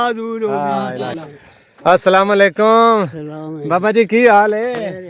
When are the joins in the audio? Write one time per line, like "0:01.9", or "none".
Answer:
0:01.2